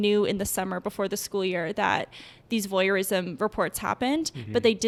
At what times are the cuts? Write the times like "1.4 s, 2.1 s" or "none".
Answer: none